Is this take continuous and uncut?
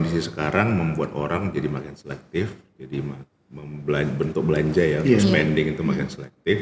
yes; 0 cuts

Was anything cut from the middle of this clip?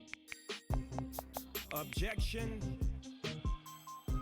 no; 0 cuts

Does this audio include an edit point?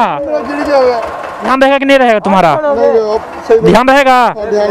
yes; 1 cut; at 1.5 s

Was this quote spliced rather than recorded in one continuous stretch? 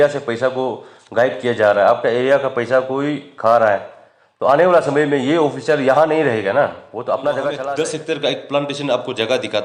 yes; 1 cut; at 7.6 s

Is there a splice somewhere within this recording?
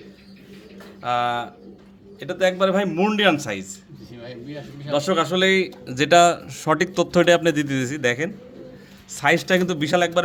no; 0 cuts

